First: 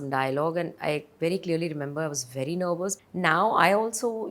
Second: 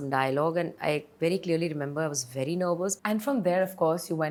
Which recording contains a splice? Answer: first; 1 cut; at 3.0 s

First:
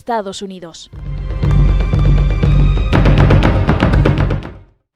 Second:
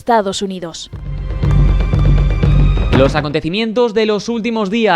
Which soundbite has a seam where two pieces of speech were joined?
second; 1 cut; at 3.0 s

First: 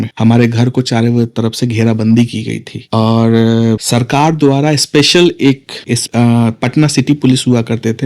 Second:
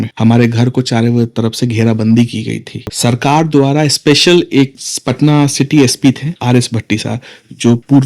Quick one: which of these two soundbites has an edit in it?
second; 2 cuts; at 2.9 s, 4.9 s

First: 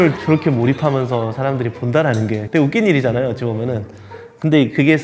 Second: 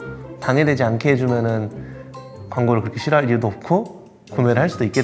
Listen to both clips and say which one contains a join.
first; 1 cut; at 2.4 s

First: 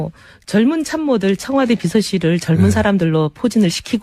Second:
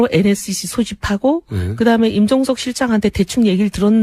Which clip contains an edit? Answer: first; 1 cut; at 2.6 s

